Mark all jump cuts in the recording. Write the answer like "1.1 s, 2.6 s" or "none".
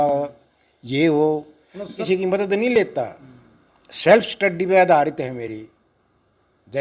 2.0 s